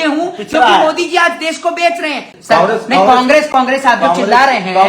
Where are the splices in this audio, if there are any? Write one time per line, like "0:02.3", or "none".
0:02.3